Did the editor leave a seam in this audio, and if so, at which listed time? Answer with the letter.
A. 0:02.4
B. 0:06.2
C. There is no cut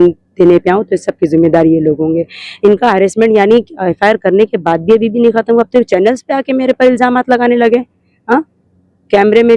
C